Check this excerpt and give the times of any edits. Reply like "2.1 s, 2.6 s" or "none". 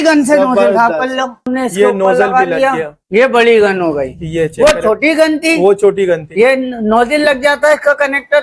1.5 s, 2.9 s